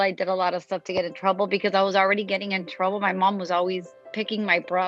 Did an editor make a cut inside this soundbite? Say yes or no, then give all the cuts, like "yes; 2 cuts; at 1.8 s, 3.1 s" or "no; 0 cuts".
yes; 1 cut; at 4.0 s